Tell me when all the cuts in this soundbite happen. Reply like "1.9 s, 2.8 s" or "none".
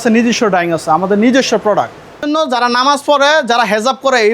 2.2 s